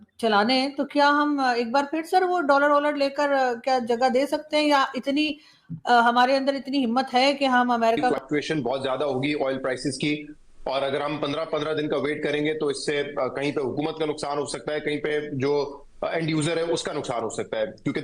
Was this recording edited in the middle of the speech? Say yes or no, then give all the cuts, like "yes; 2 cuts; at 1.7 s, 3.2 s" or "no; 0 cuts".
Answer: yes; 1 cut; at 8.1 s